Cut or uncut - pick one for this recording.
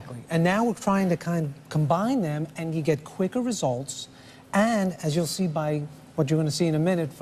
uncut